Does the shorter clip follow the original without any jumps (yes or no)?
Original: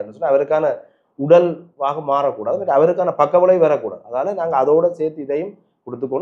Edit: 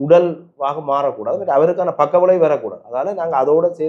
yes